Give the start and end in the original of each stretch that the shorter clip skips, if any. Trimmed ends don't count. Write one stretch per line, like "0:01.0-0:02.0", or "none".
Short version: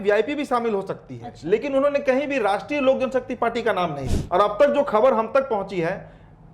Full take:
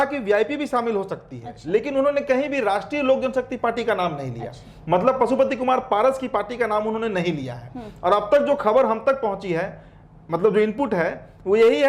0:04.3-0:07.8